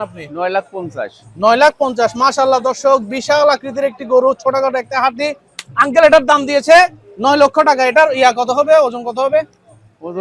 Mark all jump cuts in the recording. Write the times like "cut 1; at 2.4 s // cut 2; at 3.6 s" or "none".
none